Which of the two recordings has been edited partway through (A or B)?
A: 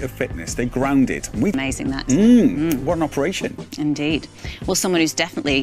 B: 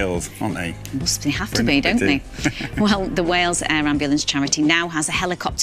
A